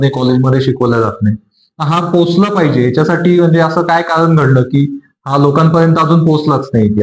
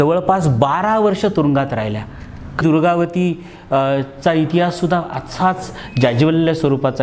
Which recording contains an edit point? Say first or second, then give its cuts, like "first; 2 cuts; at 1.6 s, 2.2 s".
second; 1 cut; at 2.6 s